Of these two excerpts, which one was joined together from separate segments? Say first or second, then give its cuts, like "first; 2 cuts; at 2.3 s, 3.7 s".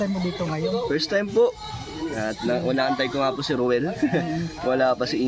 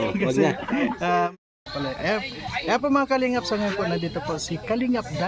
second; 1 cut; at 1.3 s